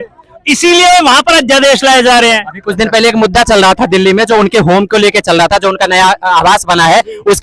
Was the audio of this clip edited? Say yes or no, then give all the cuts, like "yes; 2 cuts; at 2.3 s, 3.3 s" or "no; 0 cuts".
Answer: no; 0 cuts